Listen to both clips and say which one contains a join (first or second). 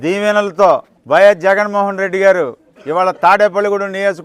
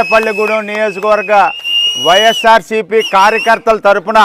first